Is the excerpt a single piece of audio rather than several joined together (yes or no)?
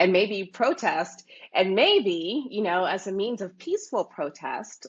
yes